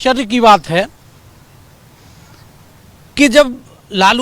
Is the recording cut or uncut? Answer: uncut